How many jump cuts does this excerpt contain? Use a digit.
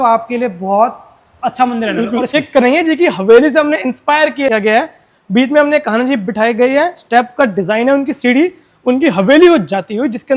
2